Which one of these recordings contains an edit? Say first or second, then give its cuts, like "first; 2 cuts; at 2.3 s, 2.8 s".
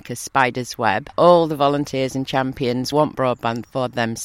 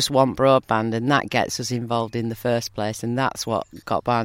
first; 2 cuts; at 1.1 s, 2.9 s